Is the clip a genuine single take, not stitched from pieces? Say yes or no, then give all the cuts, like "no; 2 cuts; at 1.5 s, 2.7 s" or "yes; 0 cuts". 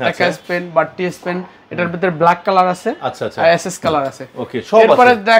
yes; 0 cuts